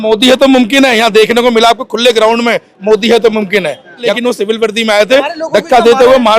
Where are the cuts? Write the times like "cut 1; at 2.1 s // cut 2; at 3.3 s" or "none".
cut 1; at 4.1 s